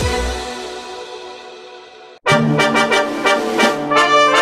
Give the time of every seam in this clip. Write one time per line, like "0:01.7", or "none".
none